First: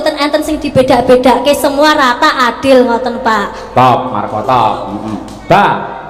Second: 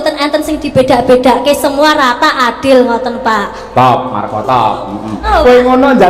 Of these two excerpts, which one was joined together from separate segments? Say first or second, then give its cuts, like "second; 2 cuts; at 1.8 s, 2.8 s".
second; 1 cut; at 5.1 s